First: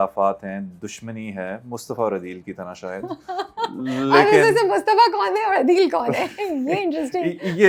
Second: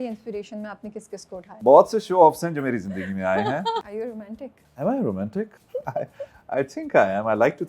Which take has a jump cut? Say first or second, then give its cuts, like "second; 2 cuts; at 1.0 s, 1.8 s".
second; 3 cuts; at 1.5 s, 3.9 s, 5.6 s